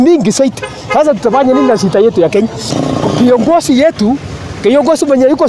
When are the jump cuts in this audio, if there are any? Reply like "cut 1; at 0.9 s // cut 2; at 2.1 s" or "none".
cut 1; at 2.7 s